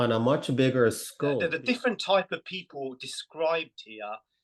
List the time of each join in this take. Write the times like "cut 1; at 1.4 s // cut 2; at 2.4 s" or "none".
cut 1; at 1.4 s